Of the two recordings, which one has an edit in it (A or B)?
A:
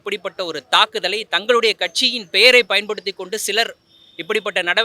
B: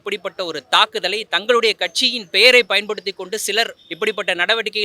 B